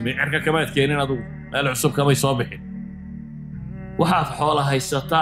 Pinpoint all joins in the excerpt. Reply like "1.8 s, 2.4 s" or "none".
2.5 s, 3.9 s